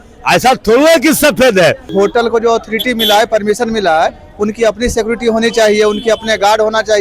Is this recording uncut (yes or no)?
no